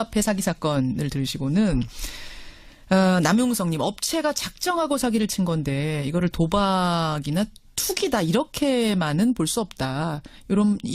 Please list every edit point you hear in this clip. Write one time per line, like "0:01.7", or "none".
0:08.8